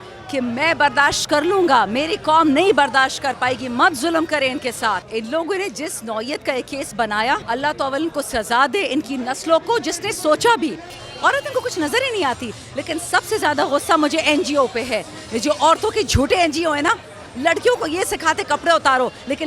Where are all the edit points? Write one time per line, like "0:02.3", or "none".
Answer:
0:05.1
0:07.4
0:11.0